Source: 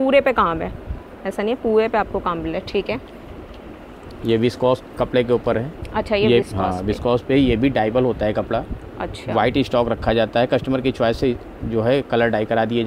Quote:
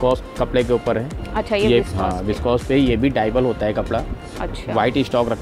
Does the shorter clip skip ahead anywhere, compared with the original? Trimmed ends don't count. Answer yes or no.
no